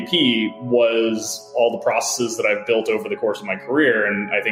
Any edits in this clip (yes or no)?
no